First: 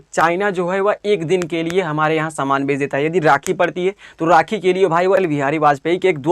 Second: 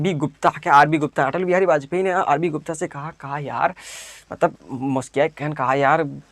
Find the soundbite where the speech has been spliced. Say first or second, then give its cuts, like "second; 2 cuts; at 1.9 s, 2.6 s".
first; 1 cut; at 5.2 s